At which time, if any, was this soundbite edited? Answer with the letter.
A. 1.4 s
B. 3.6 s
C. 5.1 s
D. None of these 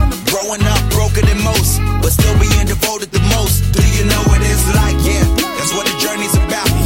D